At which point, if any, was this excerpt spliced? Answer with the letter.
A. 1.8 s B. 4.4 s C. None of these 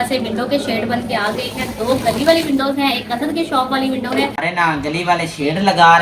B